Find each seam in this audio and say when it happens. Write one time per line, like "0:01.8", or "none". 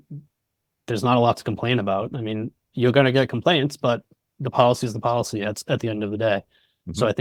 none